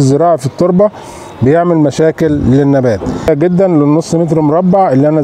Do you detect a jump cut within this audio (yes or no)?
yes